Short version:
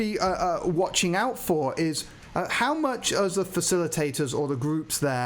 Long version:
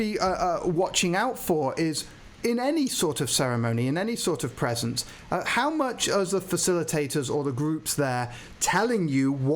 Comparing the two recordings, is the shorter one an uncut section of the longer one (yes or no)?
no